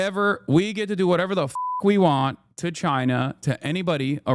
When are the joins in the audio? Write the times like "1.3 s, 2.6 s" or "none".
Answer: none